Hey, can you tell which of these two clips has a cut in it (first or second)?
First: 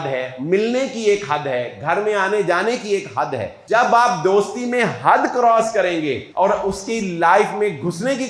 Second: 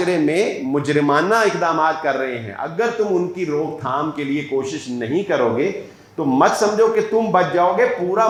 first